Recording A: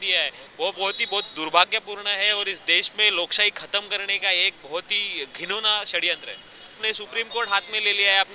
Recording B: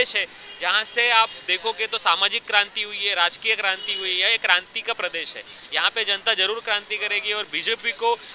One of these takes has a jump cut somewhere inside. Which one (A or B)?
A